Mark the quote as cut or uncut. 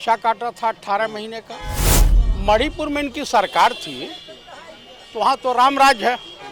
cut